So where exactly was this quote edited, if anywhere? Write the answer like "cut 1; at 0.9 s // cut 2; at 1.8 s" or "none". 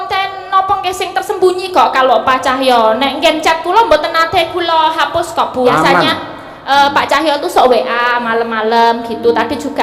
cut 1; at 5.7 s